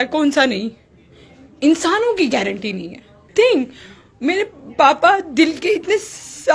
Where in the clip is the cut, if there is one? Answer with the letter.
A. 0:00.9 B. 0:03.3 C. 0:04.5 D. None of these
B